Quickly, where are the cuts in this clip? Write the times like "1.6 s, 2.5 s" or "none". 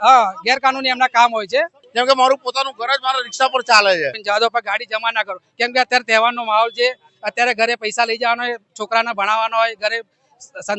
1.8 s, 4.2 s